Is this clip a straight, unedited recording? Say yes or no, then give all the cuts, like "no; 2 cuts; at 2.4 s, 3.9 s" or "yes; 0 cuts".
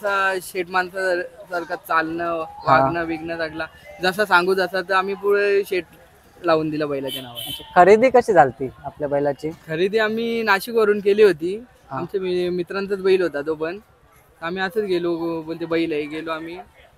yes; 0 cuts